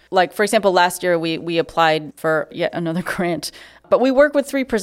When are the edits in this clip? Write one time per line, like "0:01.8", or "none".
0:02.3
0:03.9